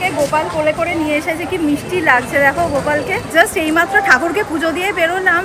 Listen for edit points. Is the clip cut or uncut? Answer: cut